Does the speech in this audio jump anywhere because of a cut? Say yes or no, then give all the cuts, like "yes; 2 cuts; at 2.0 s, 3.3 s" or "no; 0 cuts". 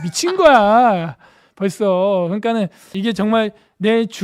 yes; 1 cut; at 2.9 s